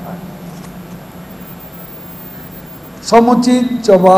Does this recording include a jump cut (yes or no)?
no